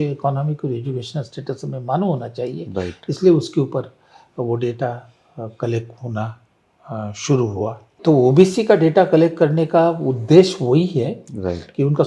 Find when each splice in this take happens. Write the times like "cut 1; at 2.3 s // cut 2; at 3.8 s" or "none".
cut 1; at 8.0 s